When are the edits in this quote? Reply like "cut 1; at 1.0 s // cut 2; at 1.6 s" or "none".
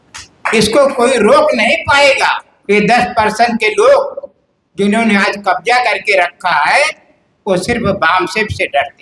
cut 1; at 2.5 s